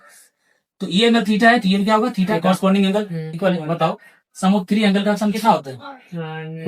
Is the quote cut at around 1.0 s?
no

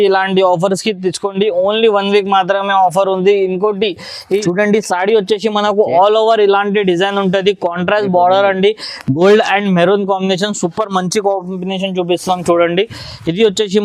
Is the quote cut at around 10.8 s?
no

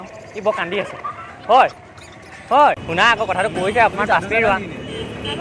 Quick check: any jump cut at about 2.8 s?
yes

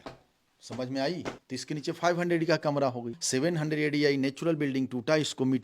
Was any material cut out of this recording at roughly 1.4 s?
yes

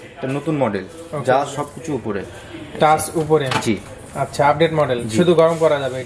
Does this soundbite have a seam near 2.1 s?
no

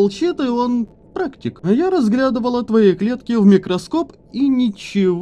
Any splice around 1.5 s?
yes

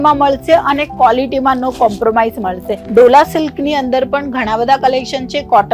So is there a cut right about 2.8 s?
yes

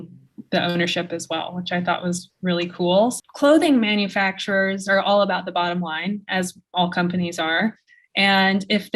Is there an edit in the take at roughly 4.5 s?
no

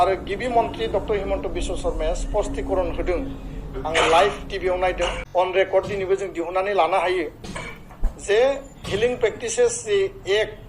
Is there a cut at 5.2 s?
yes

